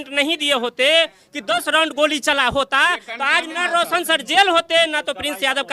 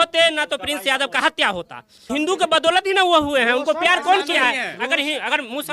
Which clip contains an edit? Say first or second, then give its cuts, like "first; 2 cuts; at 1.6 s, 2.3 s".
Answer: second; 1 cut; at 2.1 s